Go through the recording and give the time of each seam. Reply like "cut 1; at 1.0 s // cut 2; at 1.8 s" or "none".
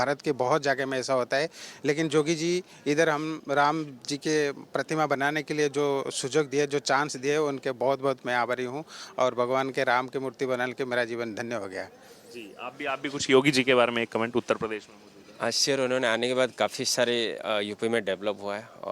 none